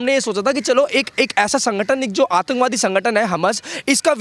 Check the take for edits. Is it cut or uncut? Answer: uncut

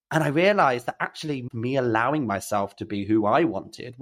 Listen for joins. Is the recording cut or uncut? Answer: cut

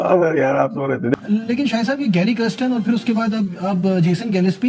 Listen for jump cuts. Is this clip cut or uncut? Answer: cut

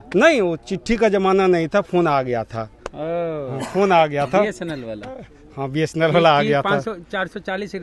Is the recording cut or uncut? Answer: uncut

